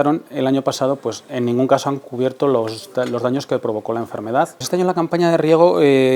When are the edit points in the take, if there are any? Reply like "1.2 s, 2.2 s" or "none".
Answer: 4.6 s